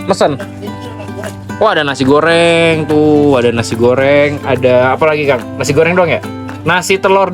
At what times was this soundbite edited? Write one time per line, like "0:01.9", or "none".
none